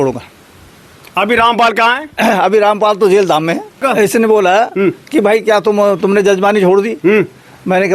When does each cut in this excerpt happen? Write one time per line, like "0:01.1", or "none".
0:03.8